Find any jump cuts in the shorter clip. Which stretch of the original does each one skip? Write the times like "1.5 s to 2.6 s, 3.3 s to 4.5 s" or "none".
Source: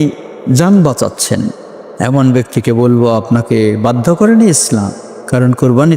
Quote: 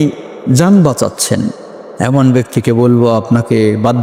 none